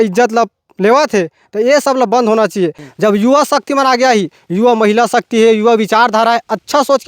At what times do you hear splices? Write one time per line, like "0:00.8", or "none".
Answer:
0:02.8